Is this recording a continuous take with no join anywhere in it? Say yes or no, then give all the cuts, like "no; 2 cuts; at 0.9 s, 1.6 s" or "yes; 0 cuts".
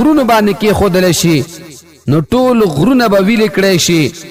yes; 0 cuts